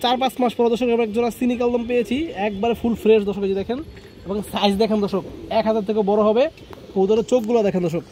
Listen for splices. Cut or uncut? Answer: uncut